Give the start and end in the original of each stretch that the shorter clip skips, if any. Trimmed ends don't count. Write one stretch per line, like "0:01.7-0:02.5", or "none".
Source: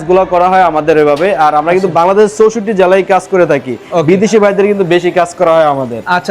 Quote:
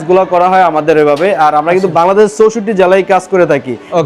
none